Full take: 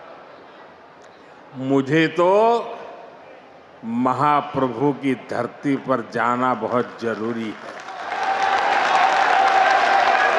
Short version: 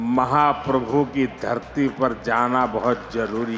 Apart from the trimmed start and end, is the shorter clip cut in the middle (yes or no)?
no